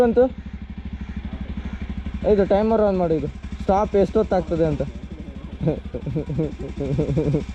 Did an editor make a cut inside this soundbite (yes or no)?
no